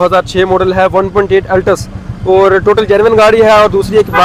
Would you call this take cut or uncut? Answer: uncut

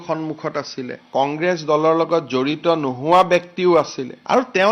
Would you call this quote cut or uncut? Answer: uncut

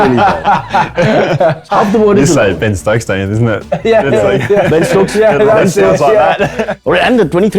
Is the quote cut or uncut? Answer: cut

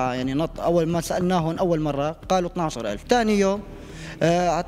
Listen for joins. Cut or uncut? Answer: cut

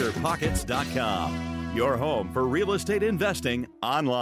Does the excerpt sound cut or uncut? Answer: uncut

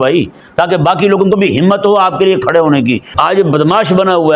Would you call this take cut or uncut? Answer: cut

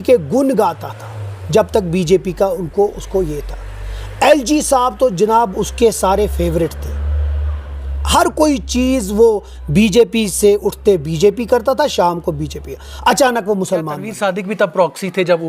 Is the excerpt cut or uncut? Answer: cut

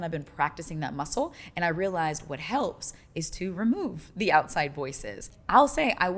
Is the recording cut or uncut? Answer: uncut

